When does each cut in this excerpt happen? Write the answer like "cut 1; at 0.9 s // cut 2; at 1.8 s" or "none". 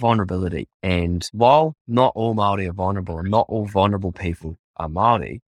cut 1; at 0.9 s